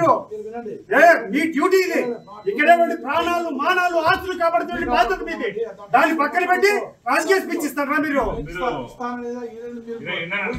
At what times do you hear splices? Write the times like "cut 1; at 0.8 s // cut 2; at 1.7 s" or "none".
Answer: none